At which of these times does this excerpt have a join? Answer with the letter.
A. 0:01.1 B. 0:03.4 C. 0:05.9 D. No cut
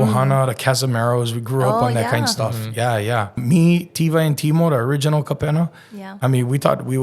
B